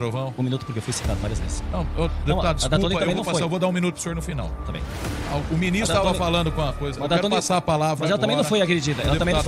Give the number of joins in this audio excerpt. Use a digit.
0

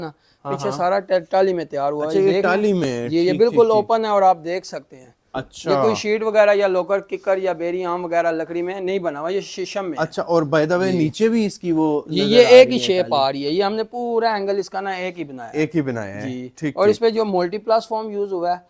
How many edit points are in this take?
0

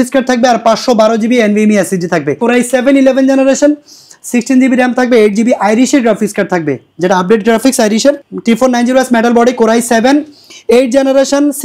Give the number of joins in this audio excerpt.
2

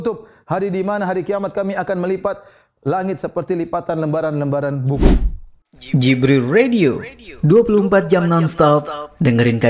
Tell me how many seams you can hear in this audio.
1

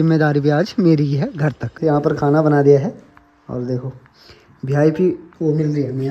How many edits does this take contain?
1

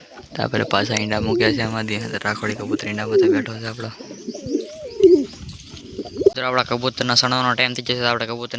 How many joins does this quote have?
1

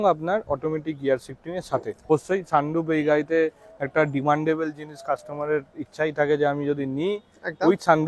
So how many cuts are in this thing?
1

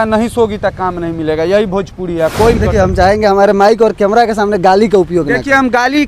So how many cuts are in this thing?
1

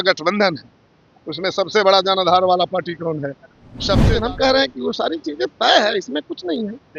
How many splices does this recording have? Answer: 1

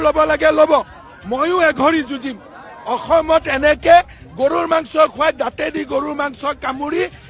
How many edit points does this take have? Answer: 0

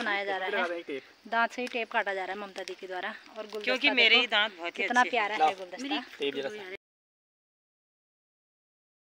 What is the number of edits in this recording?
0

